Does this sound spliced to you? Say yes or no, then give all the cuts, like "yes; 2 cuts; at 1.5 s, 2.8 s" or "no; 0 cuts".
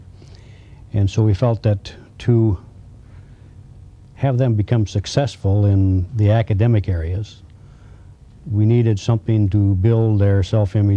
no; 0 cuts